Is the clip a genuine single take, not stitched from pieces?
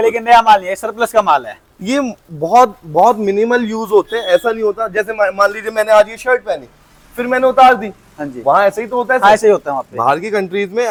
yes; 0 cuts

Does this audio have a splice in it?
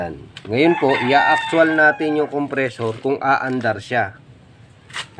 no; 0 cuts

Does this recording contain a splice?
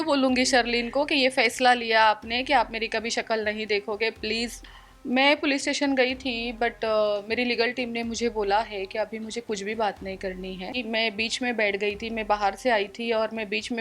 yes; 2 cuts; at 4.6 s, 10.8 s

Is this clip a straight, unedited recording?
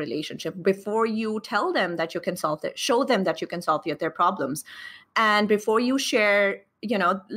yes; 0 cuts

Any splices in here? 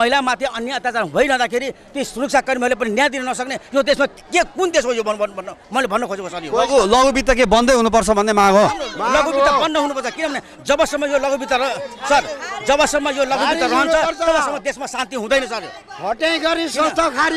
no; 0 cuts

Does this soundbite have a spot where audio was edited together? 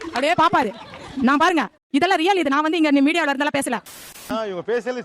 yes; 1 cut; at 3.9 s

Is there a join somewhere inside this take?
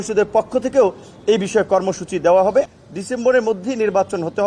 yes; 1 cut; at 2.7 s

